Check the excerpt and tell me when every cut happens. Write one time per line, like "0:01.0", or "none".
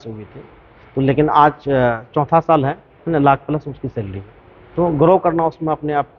none